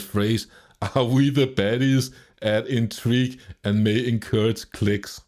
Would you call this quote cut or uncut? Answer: uncut